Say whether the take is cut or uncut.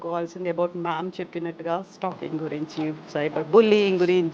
uncut